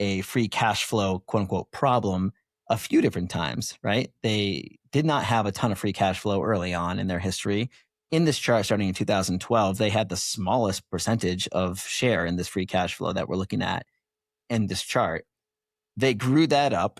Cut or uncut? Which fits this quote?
uncut